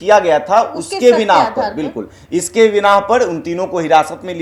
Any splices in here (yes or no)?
no